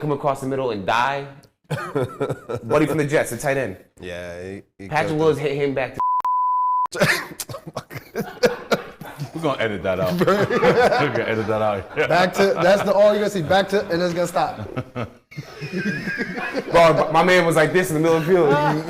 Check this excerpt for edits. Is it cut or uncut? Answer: uncut